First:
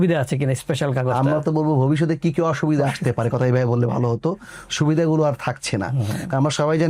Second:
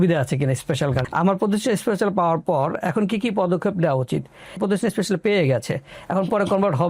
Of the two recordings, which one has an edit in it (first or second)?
second